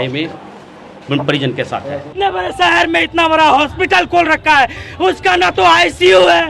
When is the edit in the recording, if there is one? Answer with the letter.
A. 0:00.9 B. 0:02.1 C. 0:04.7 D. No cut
B